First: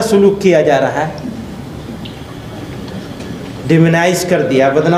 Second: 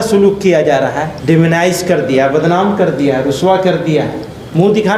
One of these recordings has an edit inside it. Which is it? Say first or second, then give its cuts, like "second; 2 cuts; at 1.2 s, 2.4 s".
second; 1 cut; at 1.1 s